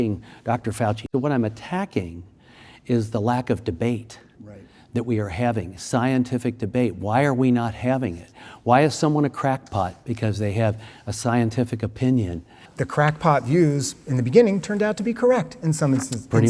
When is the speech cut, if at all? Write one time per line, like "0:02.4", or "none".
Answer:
0:01.1
0:12.7